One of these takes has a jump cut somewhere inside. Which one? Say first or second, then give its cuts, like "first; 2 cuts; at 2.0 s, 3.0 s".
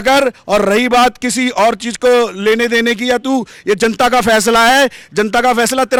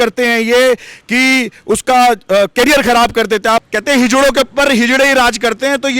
second; 1 cut; at 3.6 s